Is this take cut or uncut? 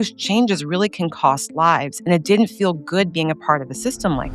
uncut